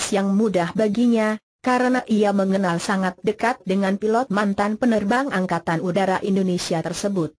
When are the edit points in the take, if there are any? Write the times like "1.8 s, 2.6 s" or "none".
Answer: 4.6 s